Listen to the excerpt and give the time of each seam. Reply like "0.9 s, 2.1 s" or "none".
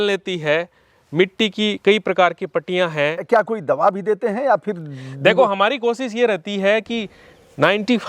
3.2 s